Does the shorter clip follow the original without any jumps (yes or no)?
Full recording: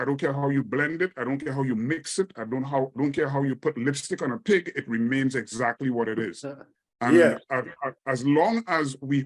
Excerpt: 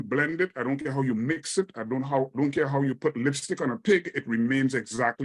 yes